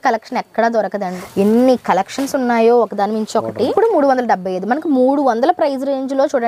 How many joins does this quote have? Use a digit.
2